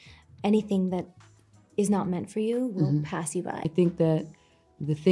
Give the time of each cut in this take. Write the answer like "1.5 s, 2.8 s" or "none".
3.6 s